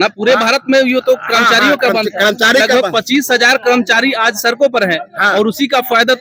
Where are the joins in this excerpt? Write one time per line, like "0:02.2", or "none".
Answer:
none

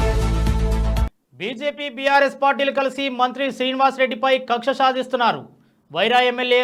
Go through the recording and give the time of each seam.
none

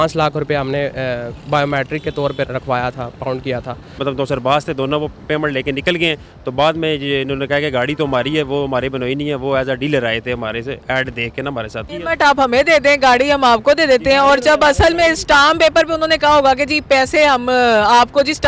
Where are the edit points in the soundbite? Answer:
0:02.5
0:03.8
0:11.9

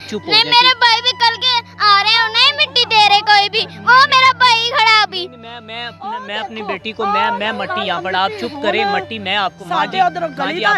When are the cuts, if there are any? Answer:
none

